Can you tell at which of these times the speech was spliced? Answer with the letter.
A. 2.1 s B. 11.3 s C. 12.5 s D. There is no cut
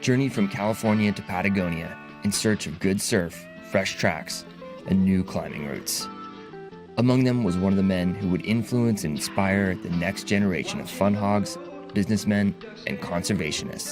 D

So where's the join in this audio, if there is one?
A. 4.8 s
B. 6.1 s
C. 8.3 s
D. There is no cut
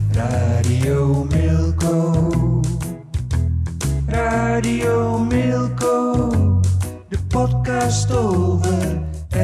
D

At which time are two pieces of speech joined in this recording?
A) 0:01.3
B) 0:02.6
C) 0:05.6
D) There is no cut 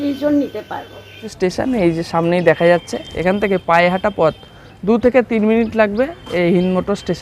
A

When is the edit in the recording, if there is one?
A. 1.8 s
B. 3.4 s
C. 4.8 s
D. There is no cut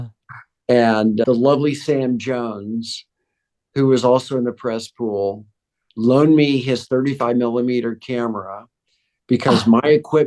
D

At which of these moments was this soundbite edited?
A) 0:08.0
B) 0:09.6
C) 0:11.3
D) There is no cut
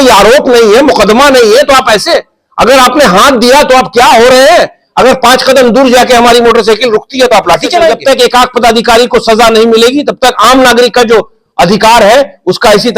A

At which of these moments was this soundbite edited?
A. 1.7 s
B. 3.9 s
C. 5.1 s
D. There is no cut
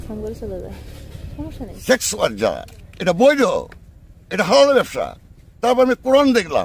A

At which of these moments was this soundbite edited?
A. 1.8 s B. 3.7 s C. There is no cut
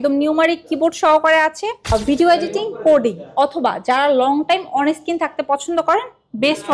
A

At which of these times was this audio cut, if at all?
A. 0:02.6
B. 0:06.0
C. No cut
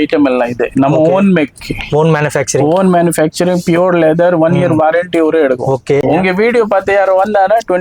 B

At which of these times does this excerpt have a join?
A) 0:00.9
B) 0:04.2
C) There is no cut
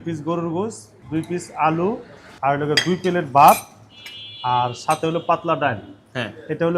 A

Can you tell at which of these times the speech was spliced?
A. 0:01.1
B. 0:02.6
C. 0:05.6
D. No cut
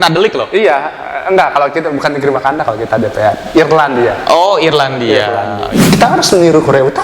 C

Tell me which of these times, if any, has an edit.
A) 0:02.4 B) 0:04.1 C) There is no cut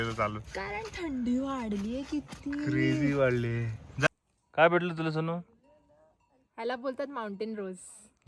B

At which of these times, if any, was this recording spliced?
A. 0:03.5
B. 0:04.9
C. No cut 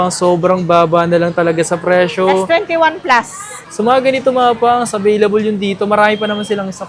C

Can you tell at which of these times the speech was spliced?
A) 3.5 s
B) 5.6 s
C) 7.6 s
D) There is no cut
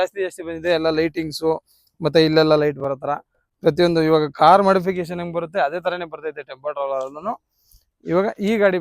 D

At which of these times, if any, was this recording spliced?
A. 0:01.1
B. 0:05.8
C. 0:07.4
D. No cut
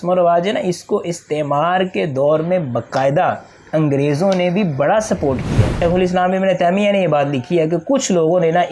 B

